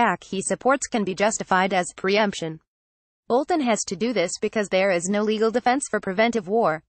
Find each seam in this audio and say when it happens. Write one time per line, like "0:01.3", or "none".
none